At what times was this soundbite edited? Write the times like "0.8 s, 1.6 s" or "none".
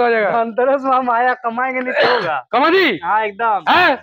none

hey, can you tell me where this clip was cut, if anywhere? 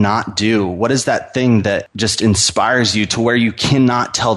1.9 s

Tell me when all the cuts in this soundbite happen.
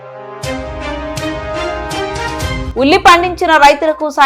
none

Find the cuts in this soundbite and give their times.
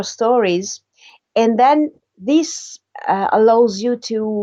none

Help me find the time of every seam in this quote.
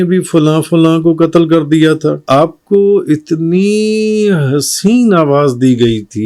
2.2 s

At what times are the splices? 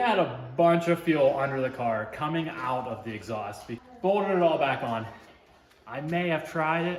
3.7 s

